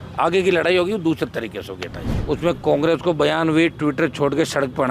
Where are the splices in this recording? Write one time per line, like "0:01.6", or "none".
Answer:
0:02.1